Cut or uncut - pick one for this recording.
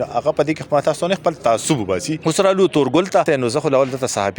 cut